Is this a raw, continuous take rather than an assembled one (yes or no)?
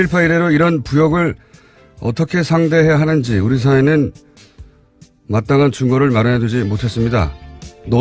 yes